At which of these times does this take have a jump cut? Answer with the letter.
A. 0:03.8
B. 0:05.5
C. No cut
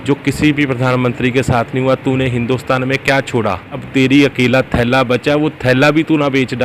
A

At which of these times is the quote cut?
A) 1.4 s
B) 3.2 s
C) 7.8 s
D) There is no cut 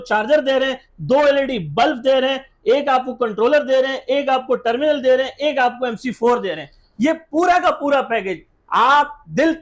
D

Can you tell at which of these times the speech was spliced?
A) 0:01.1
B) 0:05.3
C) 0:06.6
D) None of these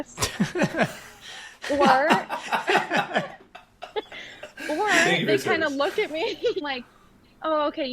C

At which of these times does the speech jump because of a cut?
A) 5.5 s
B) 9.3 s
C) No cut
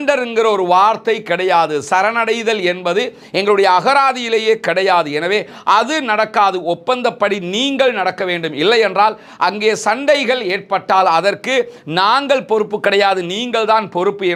C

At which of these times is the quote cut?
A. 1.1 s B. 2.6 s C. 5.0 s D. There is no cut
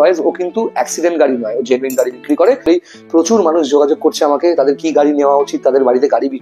B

